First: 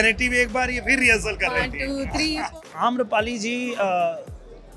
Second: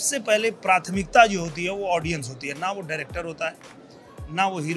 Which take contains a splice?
first; 1 cut; at 2.5 s

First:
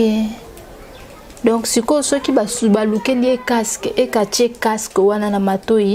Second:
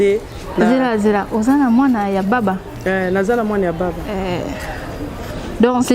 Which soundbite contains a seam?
second; 1 cut; at 4.2 s

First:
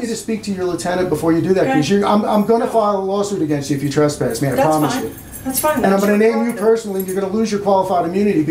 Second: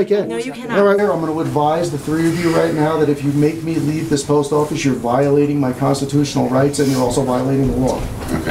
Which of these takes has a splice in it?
second; 1 cut; at 1.0 s

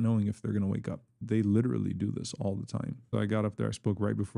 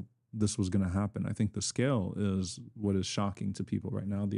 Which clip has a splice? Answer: first; 2 cuts; at 1.2 s, 3.0 s

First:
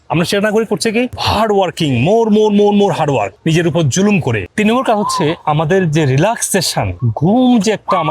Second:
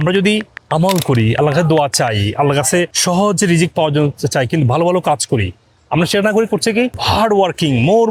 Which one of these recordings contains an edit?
first; 1 cut; at 4.4 s

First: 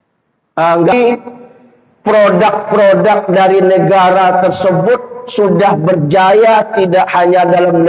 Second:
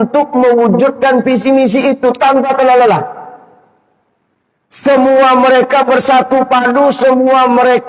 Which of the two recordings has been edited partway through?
first; 1 cut; at 0.9 s

